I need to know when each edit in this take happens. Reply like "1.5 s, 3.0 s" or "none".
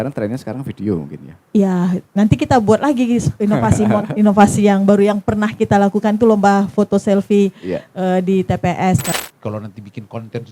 9.1 s